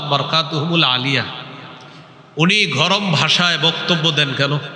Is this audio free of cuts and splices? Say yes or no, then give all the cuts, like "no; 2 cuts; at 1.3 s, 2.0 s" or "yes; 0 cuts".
yes; 0 cuts